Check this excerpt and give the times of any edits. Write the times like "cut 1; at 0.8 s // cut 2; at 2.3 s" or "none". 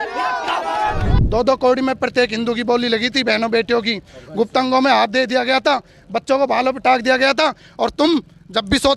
cut 1; at 1.1 s